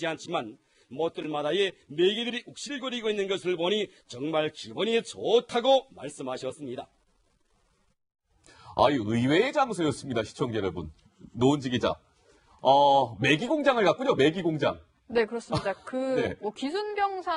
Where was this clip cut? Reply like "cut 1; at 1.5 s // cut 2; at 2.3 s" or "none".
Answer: cut 1; at 13.9 s